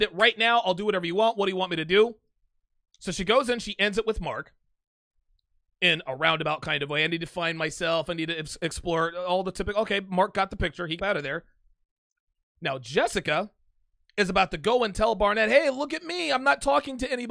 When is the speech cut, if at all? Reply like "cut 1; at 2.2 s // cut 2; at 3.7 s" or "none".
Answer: cut 1; at 11.0 s